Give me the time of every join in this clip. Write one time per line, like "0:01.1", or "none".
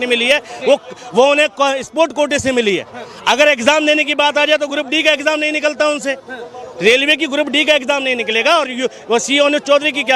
0:08.7

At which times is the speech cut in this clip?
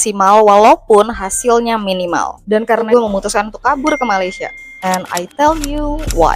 0:02.9

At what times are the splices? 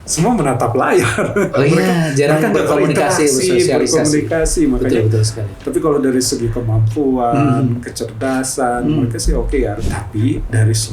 0:05.5
0:09.8

